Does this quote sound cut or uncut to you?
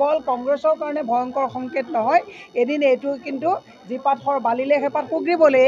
uncut